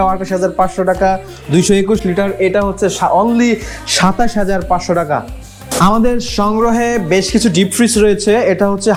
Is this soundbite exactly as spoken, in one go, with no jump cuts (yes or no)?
yes